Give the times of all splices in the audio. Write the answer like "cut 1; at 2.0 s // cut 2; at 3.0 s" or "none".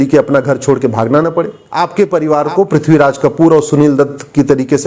cut 1; at 1.6 s